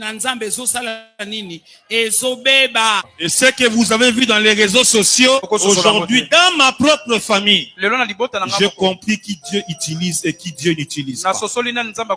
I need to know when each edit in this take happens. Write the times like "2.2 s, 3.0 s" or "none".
3.1 s, 5.5 s